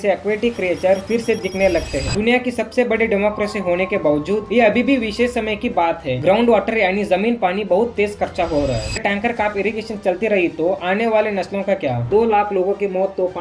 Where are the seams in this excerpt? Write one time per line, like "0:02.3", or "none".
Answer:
0:02.1
0:09.0
0:12.0